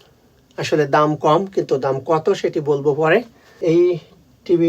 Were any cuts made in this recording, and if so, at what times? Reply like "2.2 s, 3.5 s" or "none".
3.4 s